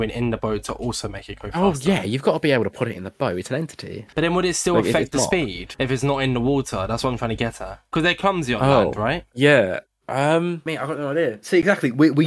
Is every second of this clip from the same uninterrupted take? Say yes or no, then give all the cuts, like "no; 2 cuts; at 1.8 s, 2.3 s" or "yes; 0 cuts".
yes; 0 cuts